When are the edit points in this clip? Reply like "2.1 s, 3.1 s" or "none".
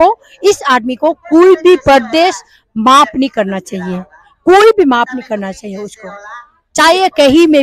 none